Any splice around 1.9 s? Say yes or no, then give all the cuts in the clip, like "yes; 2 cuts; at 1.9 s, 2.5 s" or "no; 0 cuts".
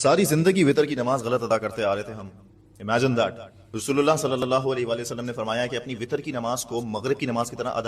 no; 1 cut; at 3.7 s